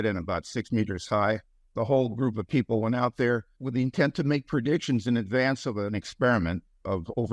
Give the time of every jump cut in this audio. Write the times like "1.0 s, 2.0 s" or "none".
1.6 s, 3.6 s, 5.9 s